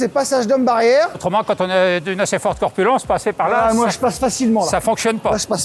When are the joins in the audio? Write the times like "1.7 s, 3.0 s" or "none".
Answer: 1.2 s